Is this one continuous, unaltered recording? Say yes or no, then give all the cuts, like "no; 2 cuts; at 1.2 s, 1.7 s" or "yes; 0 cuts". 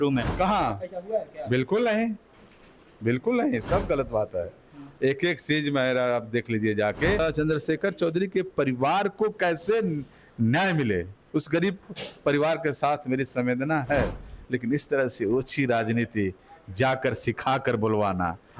no; 1 cut; at 7.2 s